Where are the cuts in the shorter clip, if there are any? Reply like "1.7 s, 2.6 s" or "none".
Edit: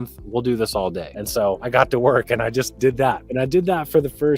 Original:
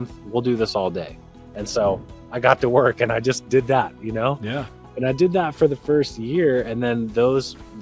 1.4 s, 3.2 s